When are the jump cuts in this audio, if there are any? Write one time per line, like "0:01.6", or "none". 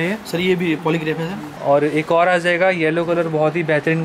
0:01.5